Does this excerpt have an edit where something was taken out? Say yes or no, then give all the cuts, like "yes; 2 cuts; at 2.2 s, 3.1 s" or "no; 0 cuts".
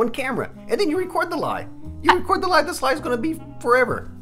no; 0 cuts